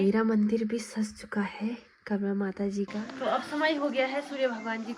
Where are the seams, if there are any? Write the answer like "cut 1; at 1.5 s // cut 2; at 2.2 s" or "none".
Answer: cut 1; at 3.0 s